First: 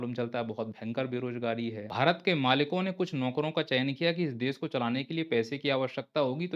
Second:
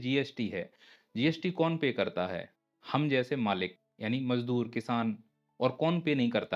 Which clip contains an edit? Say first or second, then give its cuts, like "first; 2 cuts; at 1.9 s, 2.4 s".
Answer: first; 1 cut; at 1.8 s